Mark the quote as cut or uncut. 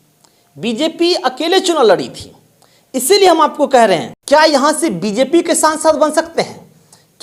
cut